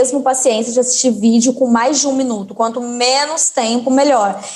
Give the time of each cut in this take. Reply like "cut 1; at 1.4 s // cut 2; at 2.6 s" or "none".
none